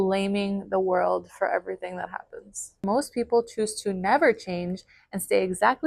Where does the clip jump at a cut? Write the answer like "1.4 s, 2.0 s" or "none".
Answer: 2.8 s

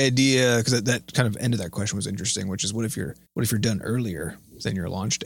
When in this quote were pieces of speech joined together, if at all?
3.2 s

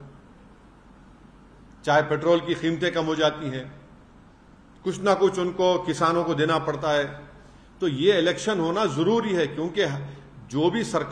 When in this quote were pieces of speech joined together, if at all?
none

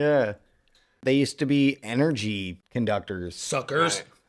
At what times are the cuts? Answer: 1.0 s, 2.5 s

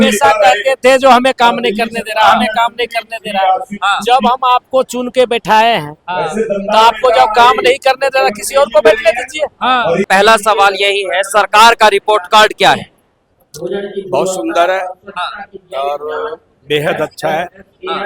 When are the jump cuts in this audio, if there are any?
10.1 s

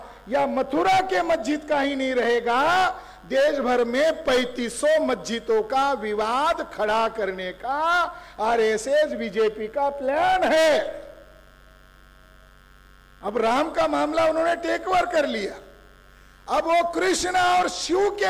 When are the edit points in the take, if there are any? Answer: 12.8 s

